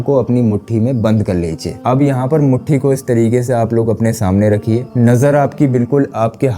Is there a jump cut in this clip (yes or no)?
no